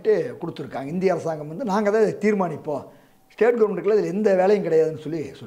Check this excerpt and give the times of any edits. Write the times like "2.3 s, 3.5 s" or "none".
none